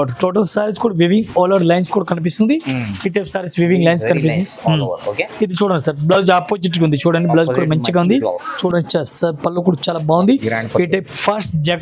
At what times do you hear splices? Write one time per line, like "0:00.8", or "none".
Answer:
0:08.5